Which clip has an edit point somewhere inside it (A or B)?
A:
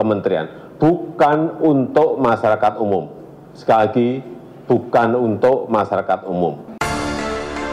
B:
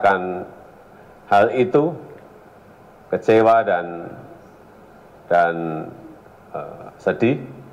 A